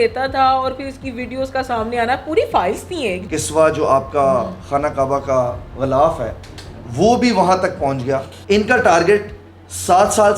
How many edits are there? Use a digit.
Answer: 2